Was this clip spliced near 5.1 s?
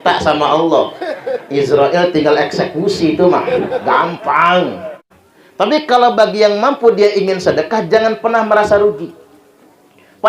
yes; 1 cut; at 5.1 s

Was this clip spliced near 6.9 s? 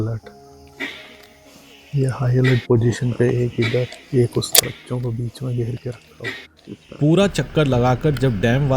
yes; 2 cuts; at 4.6 s, 6.9 s

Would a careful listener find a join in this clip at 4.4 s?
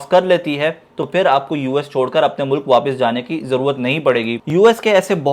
yes; 1 cut; at 4.4 s

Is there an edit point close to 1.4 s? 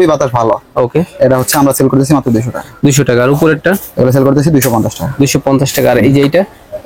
no; 0 cuts

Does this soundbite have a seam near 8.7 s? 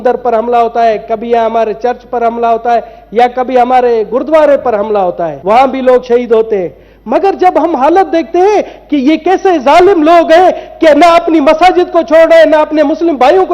no; 1 cut; at 5.3 s

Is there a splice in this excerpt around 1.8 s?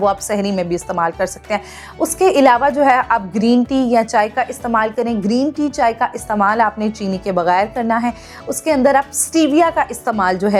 no; 0 cuts

